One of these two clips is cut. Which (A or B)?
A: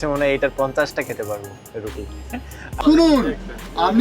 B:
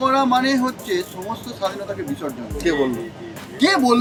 A